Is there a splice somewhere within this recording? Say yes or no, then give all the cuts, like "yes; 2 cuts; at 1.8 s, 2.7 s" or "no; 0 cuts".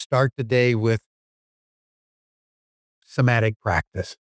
no; 0 cuts